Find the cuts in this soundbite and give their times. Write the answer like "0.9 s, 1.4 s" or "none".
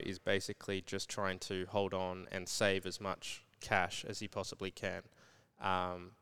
none